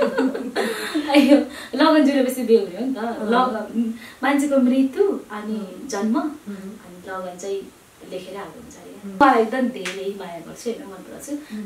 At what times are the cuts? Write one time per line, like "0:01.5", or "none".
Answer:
0:09.2